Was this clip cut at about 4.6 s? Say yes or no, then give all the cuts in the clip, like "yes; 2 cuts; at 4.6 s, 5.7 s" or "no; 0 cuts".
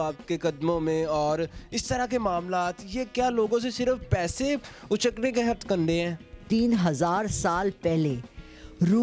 no; 1 cut; at 6.4 s